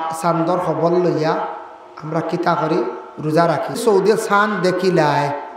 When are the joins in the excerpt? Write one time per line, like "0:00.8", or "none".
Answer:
0:03.8